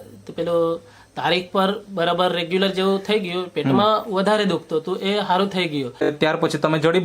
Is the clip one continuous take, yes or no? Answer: no